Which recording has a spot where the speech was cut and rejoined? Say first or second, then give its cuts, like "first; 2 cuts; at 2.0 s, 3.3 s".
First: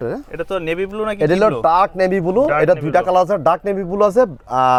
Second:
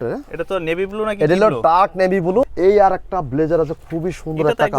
second; 1 cut; at 2.5 s